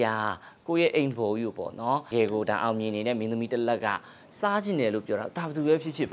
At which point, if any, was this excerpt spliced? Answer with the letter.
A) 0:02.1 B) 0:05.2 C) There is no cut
A